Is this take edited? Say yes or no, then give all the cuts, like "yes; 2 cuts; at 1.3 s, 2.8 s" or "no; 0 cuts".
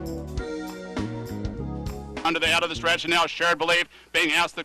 yes; 1 cut; at 2.3 s